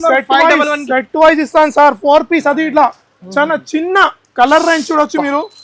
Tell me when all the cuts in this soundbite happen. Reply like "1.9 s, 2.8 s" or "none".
none